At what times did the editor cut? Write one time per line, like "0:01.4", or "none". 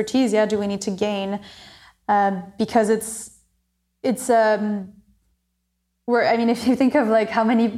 none